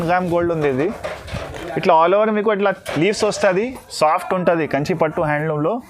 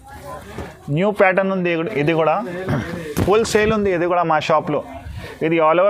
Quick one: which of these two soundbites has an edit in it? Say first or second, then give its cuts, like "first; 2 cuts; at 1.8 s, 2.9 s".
first; 1 cut; at 3.8 s